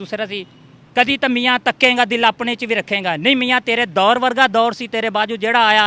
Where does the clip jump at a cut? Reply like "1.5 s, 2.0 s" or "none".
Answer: none

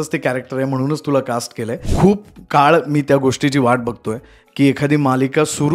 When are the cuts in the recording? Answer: 1.8 s

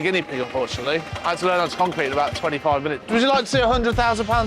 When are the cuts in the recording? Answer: 1.1 s, 3.0 s

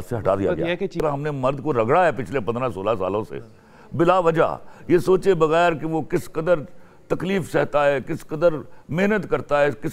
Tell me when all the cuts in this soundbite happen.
0.9 s

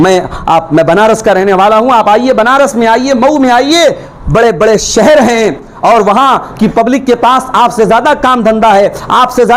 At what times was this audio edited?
none

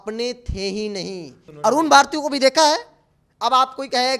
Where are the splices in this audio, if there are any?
1.4 s

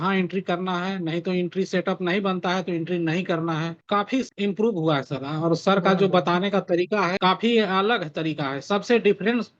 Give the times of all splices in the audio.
none

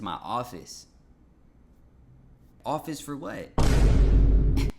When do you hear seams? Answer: 2.5 s

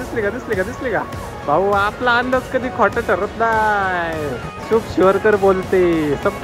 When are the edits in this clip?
4.5 s

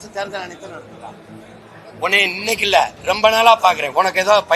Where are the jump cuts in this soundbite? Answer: 1.6 s

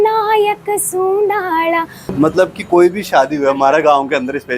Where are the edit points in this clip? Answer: 2.0 s

